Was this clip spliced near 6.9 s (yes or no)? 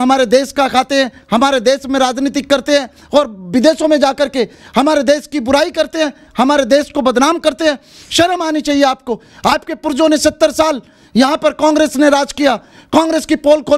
no